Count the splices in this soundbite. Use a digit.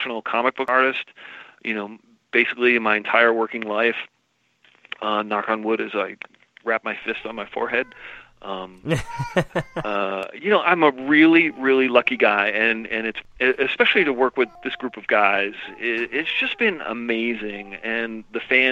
1